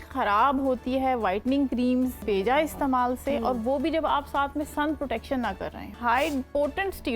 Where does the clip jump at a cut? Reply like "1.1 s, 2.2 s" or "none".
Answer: 2.2 s, 6.0 s